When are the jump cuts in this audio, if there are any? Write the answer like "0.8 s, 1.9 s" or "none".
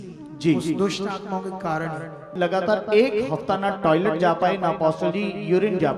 2.3 s

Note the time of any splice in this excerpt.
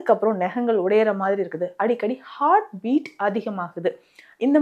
none

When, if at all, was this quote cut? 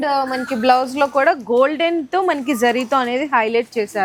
none

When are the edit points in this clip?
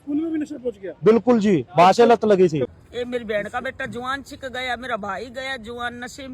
2.7 s

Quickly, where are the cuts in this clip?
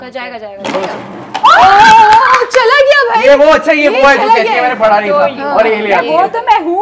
none

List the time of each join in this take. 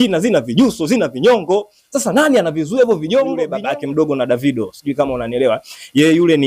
3.5 s

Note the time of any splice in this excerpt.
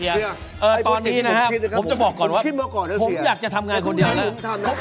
none

